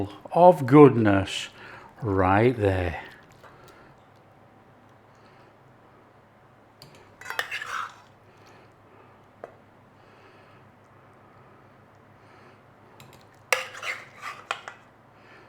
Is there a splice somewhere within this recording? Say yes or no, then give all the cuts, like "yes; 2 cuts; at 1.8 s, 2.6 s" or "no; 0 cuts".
no; 0 cuts